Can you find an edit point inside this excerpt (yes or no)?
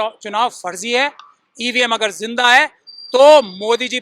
no